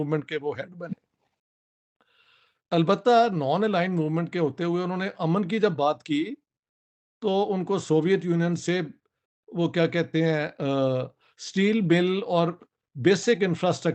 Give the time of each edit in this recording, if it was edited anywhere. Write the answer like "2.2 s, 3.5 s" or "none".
none